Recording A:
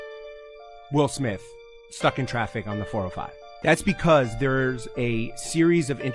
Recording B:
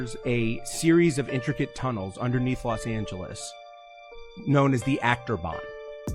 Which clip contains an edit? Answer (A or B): A